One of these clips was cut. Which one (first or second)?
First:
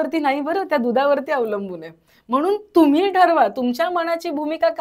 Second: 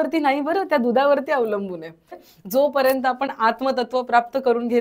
second